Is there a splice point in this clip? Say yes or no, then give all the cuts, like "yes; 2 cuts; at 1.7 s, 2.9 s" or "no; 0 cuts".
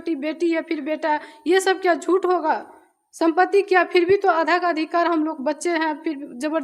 no; 0 cuts